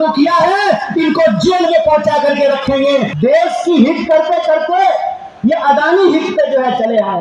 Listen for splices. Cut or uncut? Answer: cut